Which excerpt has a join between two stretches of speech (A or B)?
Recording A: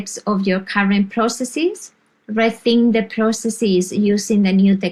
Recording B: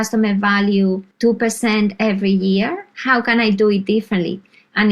B